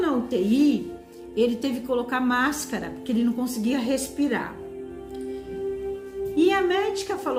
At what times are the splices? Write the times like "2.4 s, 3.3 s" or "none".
none